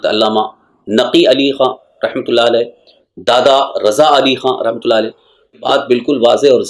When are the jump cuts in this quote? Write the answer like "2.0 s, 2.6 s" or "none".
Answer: 5.6 s